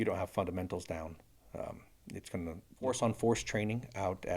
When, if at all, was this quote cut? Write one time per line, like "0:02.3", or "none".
0:02.7